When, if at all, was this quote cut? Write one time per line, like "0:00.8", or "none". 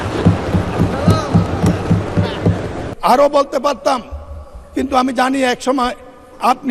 0:02.8